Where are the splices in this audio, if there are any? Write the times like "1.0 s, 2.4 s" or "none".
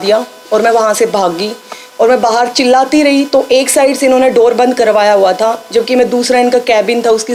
none